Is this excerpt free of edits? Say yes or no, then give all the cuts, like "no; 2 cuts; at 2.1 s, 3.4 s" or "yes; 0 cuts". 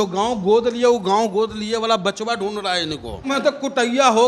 no; 1 cut; at 3.3 s